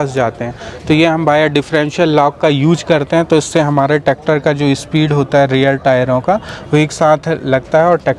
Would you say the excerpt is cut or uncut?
uncut